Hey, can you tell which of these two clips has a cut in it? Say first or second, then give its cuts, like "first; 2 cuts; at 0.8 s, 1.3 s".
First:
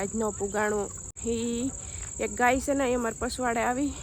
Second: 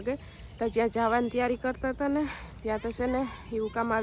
first; 1 cut; at 1.1 s